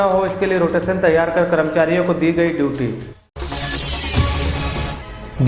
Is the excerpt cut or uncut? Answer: uncut